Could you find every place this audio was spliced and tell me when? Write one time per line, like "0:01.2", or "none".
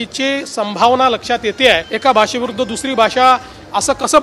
0:01.9